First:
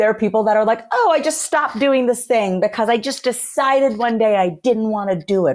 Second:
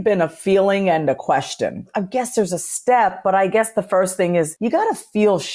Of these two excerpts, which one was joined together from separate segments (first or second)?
second